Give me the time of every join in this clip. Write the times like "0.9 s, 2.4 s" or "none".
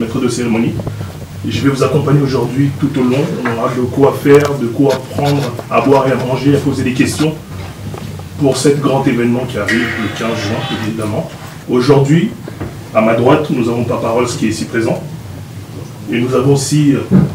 11.5 s